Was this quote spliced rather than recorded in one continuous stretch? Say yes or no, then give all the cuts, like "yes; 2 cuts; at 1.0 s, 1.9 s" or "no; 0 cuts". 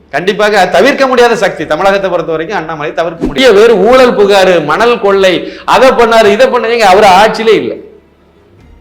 yes; 1 cut; at 3.4 s